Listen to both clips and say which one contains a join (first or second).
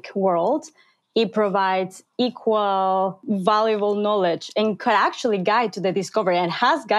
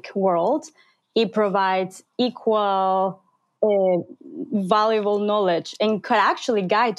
first